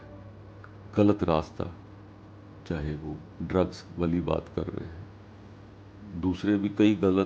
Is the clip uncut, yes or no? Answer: no